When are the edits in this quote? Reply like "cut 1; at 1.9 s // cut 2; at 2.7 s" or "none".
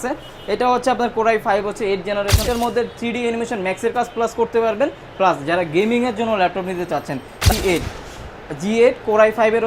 cut 1; at 2.4 s // cut 2; at 7.5 s